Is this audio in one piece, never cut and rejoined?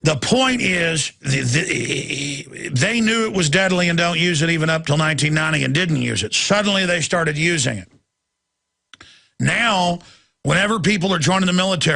yes; 0 cuts

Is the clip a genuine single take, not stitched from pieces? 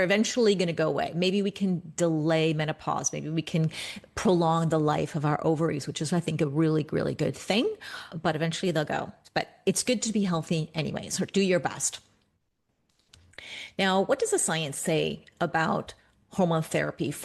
yes; 0 cuts

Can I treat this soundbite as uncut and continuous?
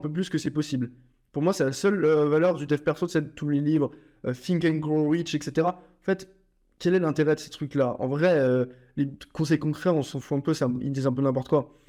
yes; 0 cuts

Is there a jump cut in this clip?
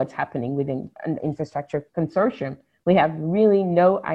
yes; 1 cut; at 1.3 s

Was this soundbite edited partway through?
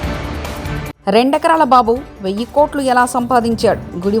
yes; 1 cut; at 0.9 s

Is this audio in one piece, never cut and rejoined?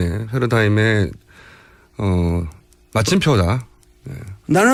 yes; 0 cuts

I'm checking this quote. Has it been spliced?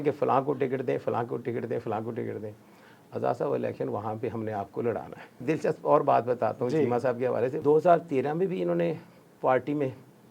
yes; 2 cuts; at 5.4 s, 7.6 s

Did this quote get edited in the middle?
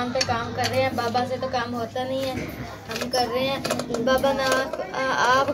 no; 0 cuts

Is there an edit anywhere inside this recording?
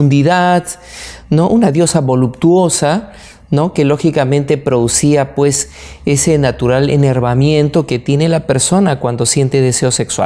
no; 0 cuts

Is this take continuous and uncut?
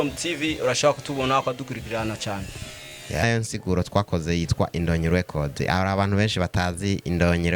no; 1 cut; at 3.2 s

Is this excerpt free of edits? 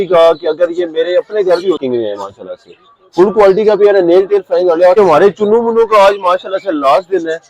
no; 2 cuts; at 1.8 s, 5.0 s

